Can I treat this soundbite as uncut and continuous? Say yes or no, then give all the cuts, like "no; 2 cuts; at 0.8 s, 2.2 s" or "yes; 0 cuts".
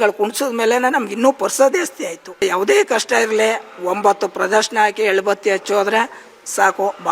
no; 1 cut; at 2.4 s